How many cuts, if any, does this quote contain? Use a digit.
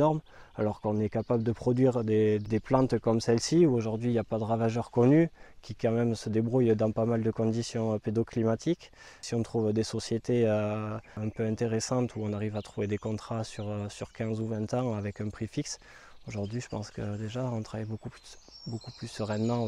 3